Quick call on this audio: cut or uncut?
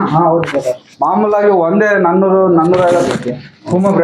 cut